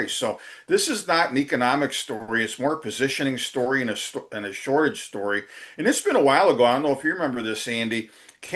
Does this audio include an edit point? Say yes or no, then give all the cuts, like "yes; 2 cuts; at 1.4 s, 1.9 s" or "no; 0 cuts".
no; 0 cuts